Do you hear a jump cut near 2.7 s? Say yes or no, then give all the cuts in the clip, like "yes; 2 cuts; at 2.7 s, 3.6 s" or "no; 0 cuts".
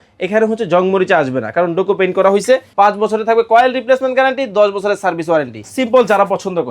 yes; 2 cuts; at 2.7 s, 5.6 s